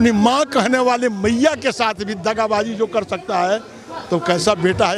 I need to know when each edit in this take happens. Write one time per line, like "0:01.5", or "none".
none

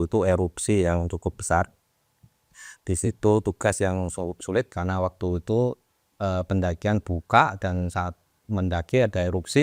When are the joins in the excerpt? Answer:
none

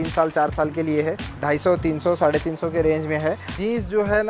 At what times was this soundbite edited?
0:01.3
0:03.5

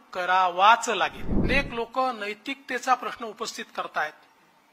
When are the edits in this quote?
0:01.4

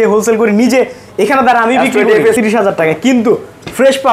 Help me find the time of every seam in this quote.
0:02.4

